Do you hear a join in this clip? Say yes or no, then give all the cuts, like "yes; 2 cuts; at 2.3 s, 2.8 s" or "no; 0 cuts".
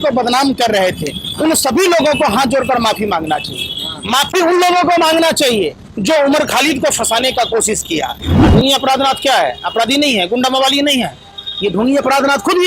yes; 1 cut; at 8.3 s